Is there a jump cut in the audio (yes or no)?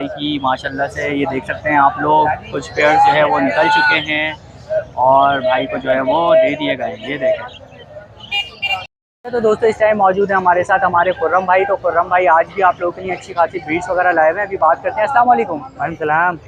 no